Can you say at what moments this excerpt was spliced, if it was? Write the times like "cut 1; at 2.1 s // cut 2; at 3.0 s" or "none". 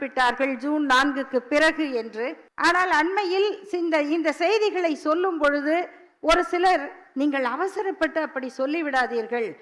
cut 1; at 2.4 s